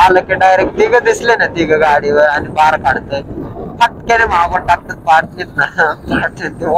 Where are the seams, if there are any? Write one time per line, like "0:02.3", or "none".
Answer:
none